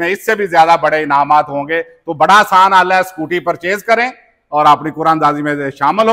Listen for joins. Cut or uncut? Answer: uncut